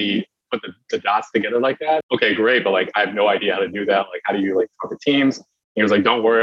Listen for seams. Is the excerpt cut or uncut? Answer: cut